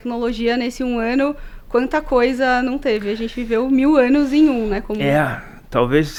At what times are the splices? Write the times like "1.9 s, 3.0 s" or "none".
none

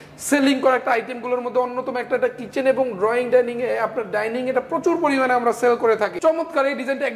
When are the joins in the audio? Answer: 6.1 s

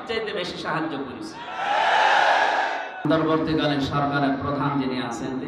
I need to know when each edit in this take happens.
3.1 s

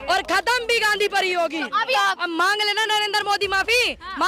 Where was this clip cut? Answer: 2.0 s

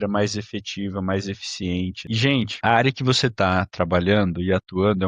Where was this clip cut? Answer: 2.0 s

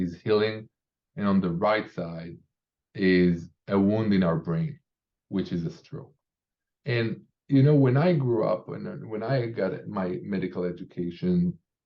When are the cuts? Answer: none

